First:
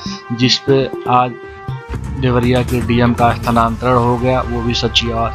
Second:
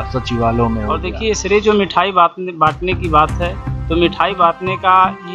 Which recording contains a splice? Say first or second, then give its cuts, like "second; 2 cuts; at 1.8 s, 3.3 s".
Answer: second; 1 cut; at 1.1 s